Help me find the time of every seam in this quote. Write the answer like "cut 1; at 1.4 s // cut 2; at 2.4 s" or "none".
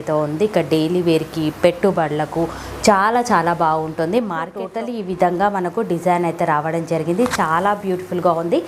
cut 1; at 4.6 s